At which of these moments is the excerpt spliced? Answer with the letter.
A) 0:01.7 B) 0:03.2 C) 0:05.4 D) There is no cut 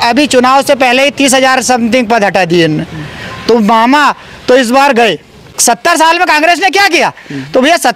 C